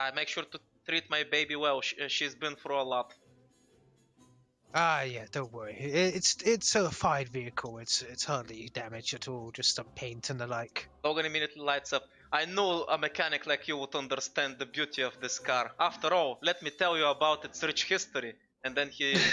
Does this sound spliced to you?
no; 0 cuts

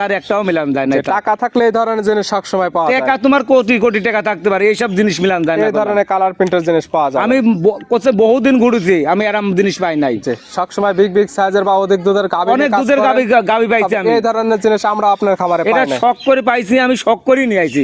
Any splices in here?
no; 0 cuts

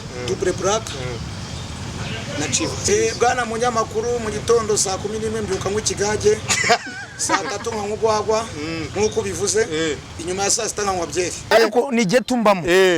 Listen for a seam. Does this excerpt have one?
yes; 2 cuts; at 2.9 s, 11.5 s

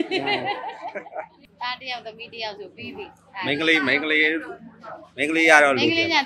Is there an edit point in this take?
yes; 1 cut; at 1.5 s

